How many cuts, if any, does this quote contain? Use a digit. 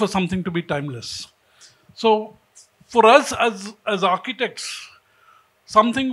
0